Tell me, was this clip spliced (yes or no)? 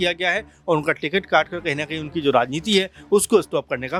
no